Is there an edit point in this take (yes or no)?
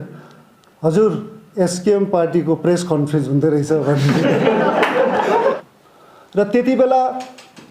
yes